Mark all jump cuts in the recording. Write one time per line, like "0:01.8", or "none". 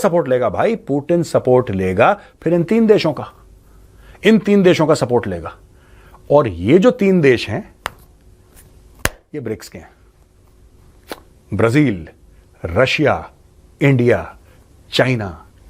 none